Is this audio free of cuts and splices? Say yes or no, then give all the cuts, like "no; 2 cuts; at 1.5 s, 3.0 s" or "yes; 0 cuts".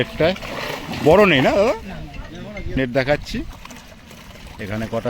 no; 1 cut; at 2.8 s